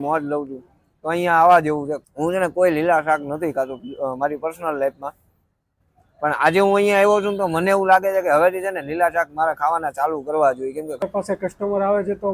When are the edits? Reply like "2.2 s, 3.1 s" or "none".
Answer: 2.0 s, 11.0 s